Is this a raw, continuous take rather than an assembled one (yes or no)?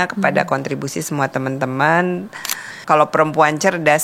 no